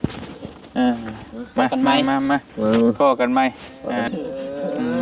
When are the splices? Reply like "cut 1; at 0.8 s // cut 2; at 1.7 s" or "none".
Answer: cut 1; at 4.1 s